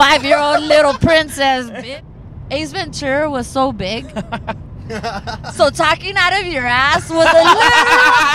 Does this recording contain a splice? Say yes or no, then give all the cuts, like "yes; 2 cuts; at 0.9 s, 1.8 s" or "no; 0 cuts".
yes; 1 cut; at 1.7 s